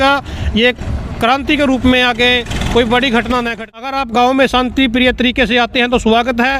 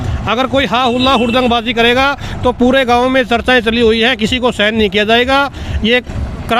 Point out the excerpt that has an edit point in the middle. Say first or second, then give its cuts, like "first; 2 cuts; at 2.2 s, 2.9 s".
first; 1 cut; at 3.6 s